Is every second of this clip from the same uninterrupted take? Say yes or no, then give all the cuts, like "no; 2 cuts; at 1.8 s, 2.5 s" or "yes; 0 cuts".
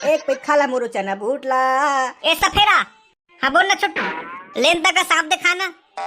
no; 1 cut; at 2.2 s